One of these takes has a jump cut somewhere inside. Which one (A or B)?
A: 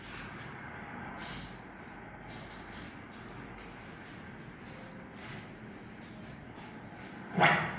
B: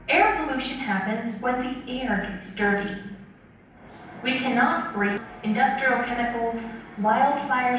B